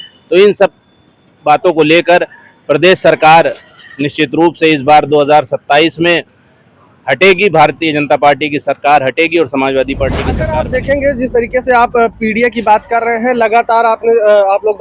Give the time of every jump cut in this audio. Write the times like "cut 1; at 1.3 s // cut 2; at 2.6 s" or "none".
cut 1; at 10.4 s